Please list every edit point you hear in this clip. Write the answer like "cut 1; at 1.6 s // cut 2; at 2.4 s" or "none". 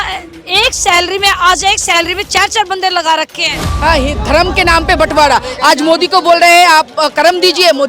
cut 1; at 3.4 s